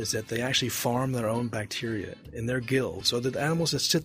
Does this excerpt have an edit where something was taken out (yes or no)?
yes